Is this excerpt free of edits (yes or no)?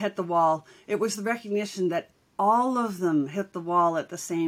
yes